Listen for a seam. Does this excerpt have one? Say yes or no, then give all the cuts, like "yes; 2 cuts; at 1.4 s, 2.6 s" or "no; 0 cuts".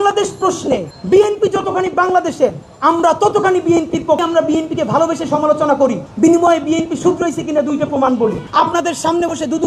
no; 0 cuts